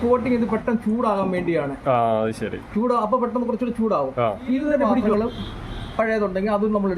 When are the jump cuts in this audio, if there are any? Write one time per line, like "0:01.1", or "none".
0:05.1